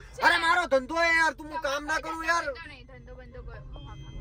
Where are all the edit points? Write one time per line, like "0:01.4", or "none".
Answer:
none